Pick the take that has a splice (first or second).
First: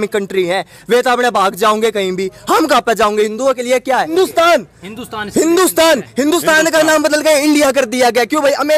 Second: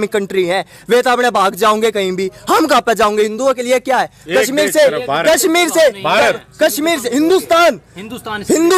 first